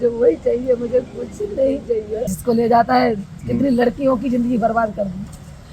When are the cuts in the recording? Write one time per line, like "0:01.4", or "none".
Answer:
0:02.3